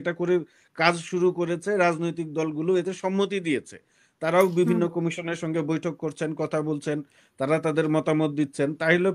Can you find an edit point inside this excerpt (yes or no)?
no